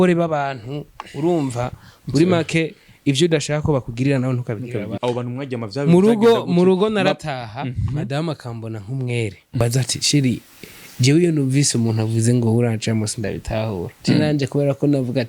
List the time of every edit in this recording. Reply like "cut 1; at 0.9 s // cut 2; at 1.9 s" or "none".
cut 1; at 4.9 s